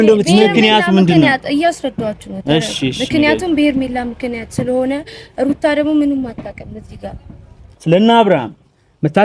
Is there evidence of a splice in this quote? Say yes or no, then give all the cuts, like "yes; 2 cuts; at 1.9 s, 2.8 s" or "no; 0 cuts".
yes; 1 cut; at 7.7 s